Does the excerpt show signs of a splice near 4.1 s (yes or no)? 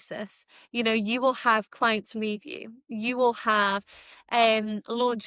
no